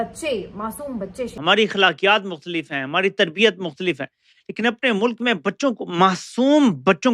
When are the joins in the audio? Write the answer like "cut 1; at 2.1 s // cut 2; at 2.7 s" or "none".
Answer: cut 1; at 1.3 s